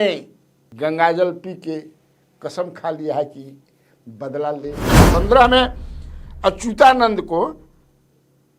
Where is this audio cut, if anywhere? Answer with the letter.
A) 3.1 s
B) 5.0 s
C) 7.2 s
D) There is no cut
B